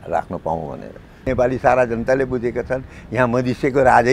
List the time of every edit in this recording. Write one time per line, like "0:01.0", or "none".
0:01.2